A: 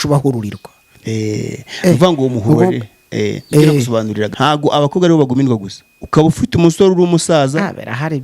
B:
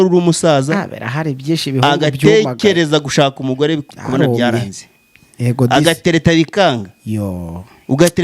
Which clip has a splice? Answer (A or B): A